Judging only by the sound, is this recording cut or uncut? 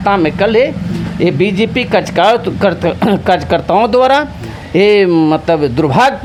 uncut